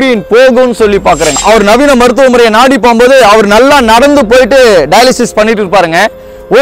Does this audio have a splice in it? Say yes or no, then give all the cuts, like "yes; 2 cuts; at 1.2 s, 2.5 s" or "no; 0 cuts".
yes; 1 cut; at 1.4 s